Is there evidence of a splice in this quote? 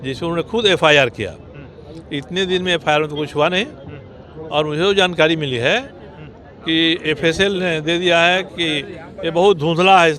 no; 0 cuts

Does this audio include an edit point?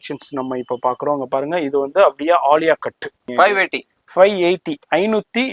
yes; 1 cut; at 3.3 s

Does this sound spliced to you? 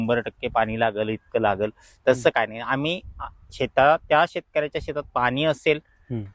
no; 0 cuts

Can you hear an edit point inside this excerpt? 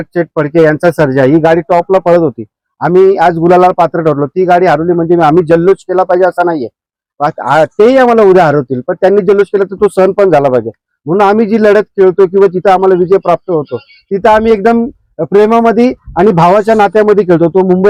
no; 0 cuts

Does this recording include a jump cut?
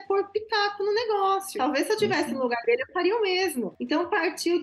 yes; 1 cut; at 1.5 s

